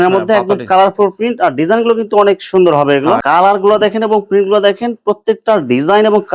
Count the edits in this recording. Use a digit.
1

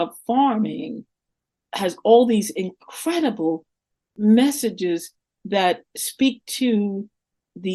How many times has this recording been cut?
0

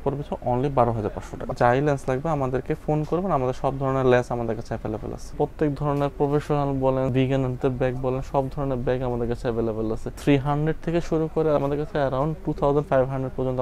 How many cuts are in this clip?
5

